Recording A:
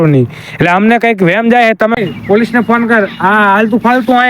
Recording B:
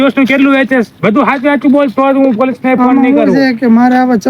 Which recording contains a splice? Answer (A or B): A